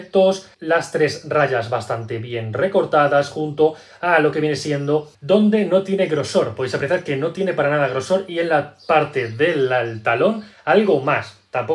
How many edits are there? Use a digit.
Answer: 1